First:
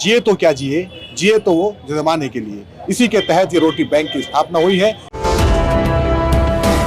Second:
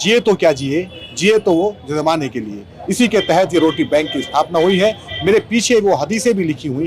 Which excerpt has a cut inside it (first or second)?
first